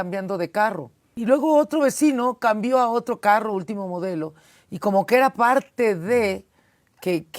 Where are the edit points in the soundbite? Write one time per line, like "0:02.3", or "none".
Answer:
0:01.2